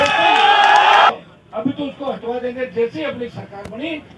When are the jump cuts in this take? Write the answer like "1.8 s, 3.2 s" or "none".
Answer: 1.1 s